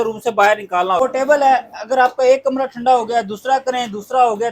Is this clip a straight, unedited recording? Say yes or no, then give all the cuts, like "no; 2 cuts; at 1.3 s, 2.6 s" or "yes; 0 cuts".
no; 1 cut; at 1.0 s